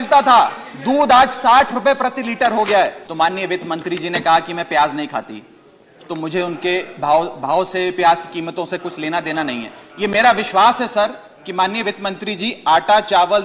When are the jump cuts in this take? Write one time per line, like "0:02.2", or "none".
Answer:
0:03.0